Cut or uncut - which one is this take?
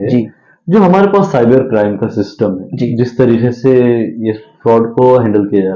uncut